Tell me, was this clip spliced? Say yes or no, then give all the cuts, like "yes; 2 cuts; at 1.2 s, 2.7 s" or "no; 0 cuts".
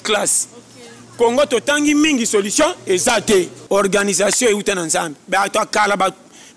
yes; 1 cut; at 3.6 s